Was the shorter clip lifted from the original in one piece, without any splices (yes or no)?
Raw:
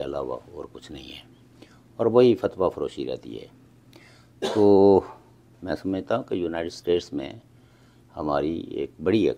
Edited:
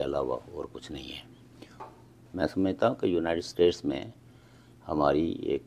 no